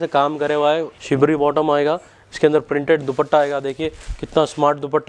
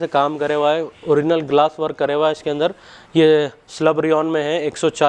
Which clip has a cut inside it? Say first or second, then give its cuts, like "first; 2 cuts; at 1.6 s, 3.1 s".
first; 1 cut; at 0.9 s